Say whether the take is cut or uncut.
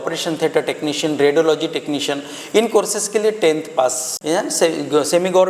cut